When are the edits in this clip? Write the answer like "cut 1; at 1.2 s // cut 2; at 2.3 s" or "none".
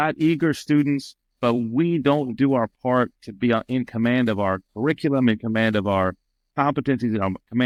none